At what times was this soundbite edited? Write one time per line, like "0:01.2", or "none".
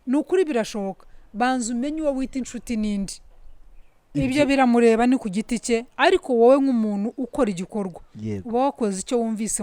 0:04.0